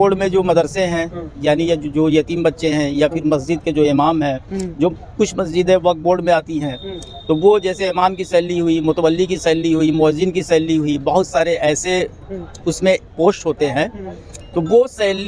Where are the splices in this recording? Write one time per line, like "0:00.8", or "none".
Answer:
none